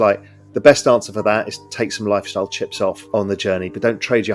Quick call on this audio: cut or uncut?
cut